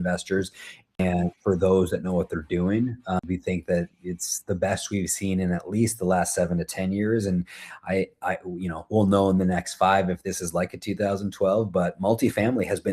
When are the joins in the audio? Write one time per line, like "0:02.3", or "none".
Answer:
0:01.0
0:03.2